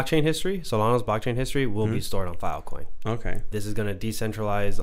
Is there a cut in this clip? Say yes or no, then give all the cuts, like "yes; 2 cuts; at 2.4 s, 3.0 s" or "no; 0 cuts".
yes; 1 cut; at 3.5 s